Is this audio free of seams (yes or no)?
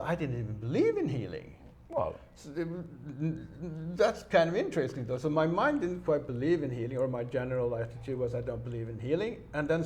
yes